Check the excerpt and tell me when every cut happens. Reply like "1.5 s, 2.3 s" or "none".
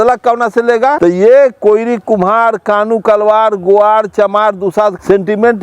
1.0 s